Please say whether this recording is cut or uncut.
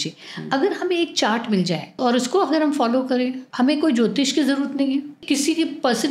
cut